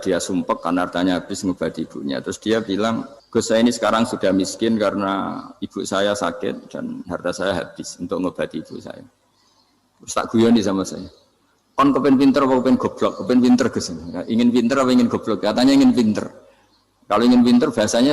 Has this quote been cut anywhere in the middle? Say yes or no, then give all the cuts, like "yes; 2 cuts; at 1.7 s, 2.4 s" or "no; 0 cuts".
yes; 1 cut; at 3.1 s